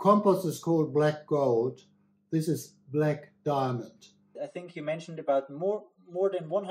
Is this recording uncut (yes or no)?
no